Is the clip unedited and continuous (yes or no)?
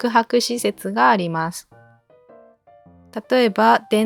yes